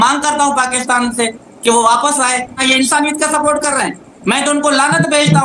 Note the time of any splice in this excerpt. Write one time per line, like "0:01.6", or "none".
0:02.6